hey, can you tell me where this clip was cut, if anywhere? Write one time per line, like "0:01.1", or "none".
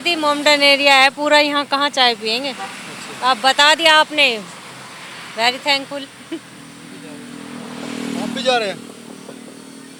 none

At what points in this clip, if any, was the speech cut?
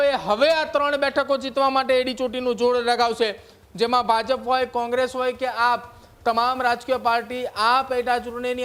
none

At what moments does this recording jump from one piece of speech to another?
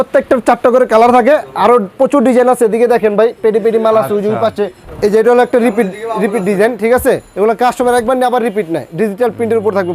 0:04.8
0:07.3

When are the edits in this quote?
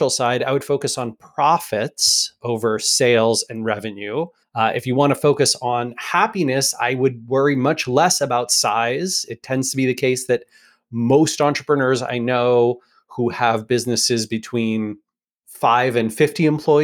0:04.4

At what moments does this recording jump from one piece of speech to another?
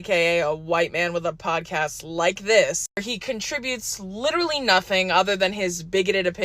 0:02.8

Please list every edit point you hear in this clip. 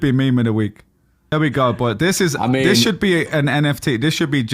0:01.2

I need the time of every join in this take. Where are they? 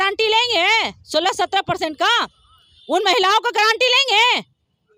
none

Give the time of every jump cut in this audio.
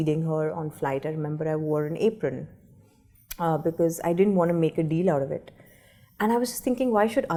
none

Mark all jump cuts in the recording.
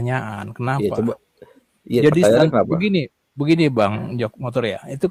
none

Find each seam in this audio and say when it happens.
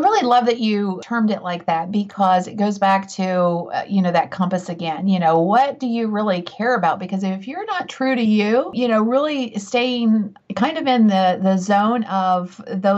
0:01.0

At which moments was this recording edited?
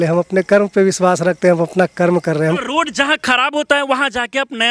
0:02.6

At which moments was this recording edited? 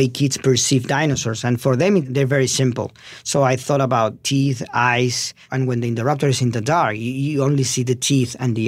0:02.1
0:04.2
0:05.4

